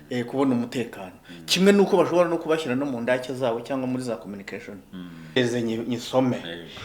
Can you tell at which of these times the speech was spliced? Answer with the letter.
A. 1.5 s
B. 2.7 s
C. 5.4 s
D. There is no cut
C